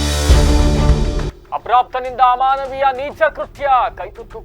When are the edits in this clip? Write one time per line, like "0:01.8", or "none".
0:01.3